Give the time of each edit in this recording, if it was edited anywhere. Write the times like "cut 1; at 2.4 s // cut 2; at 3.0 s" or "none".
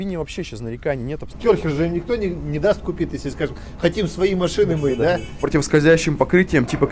cut 1; at 1.2 s // cut 2; at 5.4 s